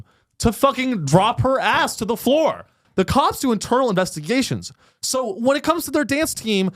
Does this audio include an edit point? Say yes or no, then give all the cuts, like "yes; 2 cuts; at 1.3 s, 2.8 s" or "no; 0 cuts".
yes; 1 cut; at 2.8 s